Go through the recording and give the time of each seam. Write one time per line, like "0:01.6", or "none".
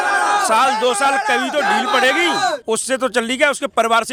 none